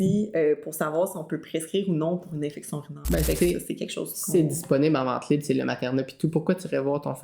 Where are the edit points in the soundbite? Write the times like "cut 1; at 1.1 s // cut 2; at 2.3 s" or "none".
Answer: cut 1; at 3.3 s

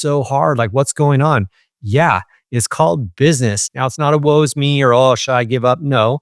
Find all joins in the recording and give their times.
cut 1; at 3.6 s

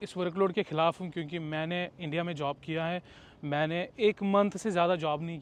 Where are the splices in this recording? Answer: none

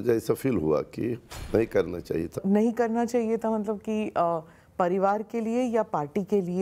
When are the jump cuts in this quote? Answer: cut 1; at 1.3 s // cut 2; at 2.4 s

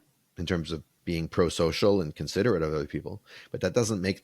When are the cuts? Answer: cut 1; at 0.9 s

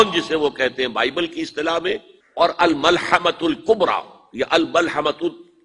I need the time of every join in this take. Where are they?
cut 1; at 2.2 s

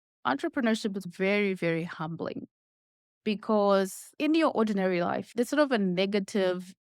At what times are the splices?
none

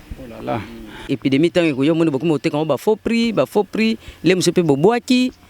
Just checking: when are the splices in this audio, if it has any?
cut 1; at 1.1 s

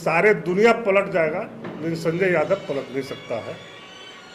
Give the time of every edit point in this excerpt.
none

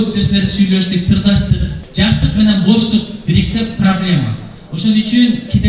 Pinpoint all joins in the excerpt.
cut 1; at 1.8 s

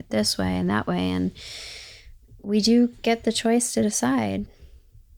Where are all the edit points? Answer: none

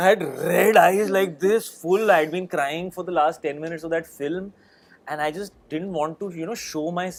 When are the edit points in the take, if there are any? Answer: none

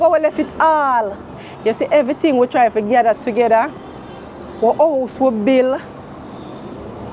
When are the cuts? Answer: cut 1; at 1.4 s

